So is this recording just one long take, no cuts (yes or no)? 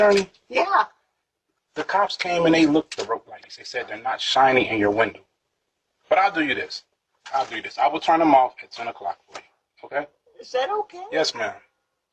no